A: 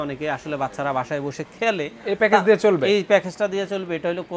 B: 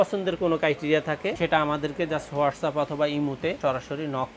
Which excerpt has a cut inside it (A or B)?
B